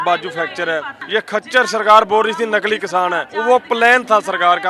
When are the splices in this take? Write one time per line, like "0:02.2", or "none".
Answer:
0:00.9
0:03.2